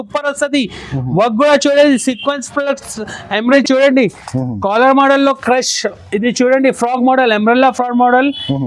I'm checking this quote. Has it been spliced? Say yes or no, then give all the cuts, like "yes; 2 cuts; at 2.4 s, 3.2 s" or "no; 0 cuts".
yes; 1 cut; at 3.6 s